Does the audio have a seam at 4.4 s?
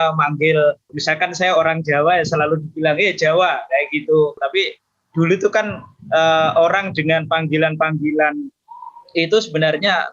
yes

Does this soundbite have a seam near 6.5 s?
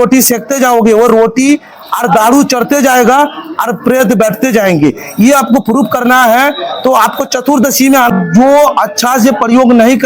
no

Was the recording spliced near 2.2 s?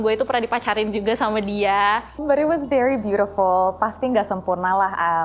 yes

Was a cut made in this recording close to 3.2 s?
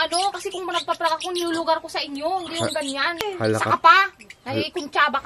yes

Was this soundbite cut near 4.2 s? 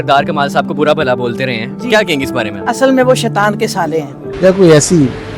yes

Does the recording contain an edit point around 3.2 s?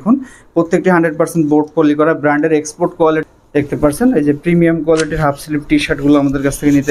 yes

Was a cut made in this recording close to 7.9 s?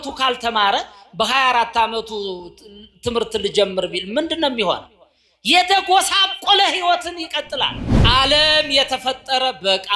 yes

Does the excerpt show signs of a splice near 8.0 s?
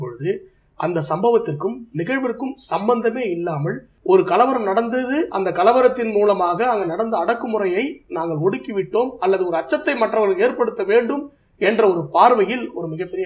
no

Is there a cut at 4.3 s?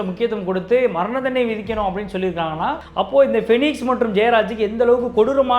no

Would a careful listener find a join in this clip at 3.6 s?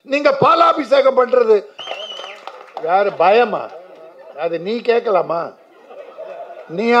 no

